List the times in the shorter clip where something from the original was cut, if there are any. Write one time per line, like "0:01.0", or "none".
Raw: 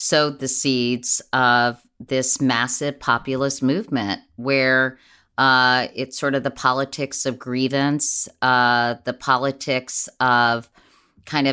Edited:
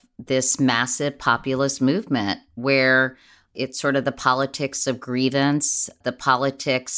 0:03.5
0:06.0

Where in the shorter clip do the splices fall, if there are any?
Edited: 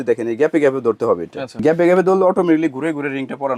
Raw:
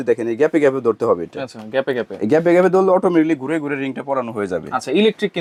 0:01.5

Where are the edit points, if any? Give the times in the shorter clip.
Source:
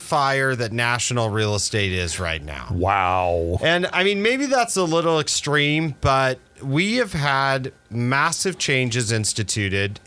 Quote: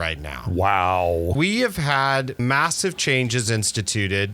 0:01.3
0:02.3

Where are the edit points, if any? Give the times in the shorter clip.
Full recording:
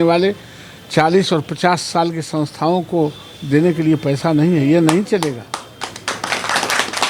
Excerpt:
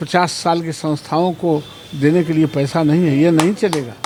none

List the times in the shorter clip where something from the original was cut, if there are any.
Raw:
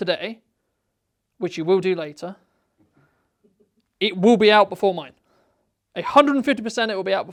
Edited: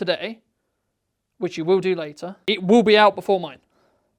0:02.2

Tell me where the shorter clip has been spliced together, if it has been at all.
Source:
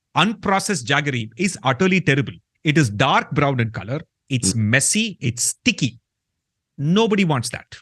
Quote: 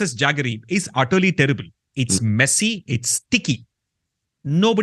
0:01.8

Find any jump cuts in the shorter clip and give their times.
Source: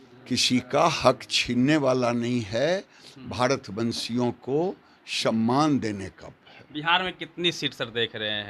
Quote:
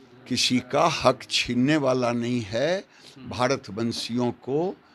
none

